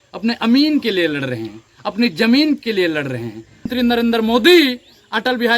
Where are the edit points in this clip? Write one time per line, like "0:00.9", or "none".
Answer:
0:03.7